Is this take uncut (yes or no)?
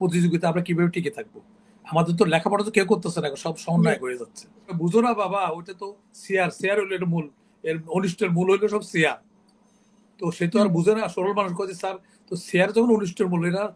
no